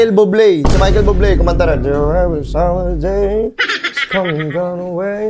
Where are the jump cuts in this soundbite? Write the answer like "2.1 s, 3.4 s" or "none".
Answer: none